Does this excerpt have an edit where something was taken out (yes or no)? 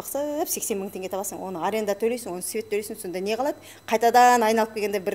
no